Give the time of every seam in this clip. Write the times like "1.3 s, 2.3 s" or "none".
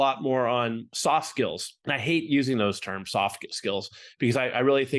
0.9 s, 1.7 s

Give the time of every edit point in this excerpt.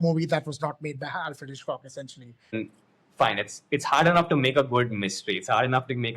2.5 s

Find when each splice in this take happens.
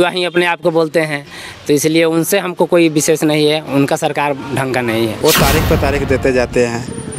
5.2 s

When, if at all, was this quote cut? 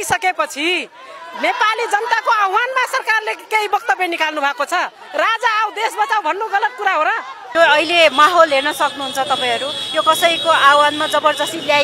7.4 s

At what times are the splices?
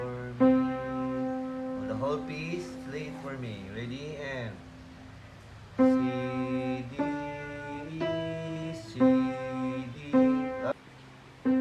10.7 s

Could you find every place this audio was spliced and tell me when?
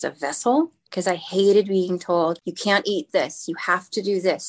0.9 s, 2.5 s

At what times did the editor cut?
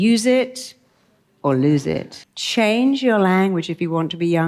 2.2 s

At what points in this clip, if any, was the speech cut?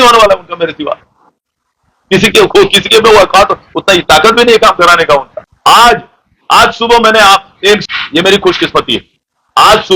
none

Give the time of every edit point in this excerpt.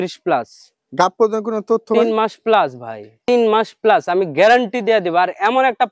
none

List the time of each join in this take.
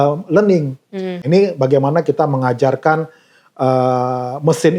1.2 s

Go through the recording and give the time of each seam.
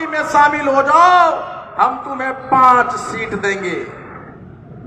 none

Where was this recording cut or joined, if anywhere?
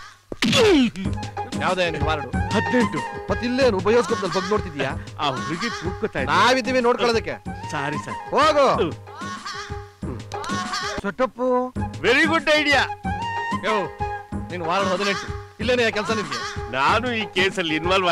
11.0 s

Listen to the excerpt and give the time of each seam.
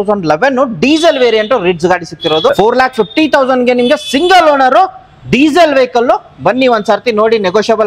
2.5 s

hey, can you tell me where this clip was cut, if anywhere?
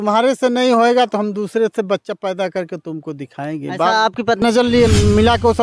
4.4 s

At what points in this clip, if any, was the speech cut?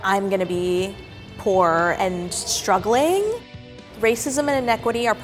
2.0 s, 3.4 s

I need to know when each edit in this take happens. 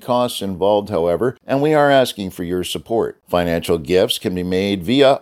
1.4 s

